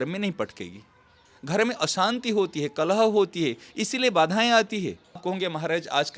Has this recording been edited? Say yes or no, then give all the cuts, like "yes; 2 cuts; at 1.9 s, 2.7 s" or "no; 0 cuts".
yes; 1 cut; at 5.2 s